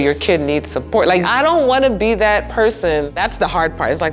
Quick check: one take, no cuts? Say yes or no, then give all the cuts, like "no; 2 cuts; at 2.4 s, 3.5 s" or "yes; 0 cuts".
no; 2 cuts; at 1.2 s, 3.1 s